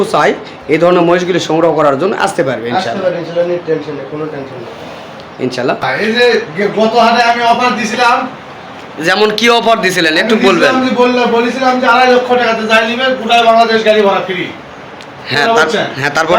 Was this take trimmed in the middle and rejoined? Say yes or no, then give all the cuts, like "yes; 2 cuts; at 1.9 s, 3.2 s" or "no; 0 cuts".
yes; 1 cut; at 5.8 s